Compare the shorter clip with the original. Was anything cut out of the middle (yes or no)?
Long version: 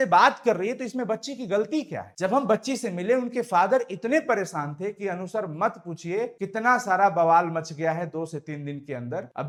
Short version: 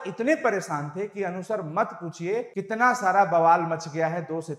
no